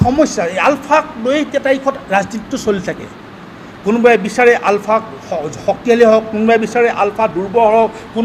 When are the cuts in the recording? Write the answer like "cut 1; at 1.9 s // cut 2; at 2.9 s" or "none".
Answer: none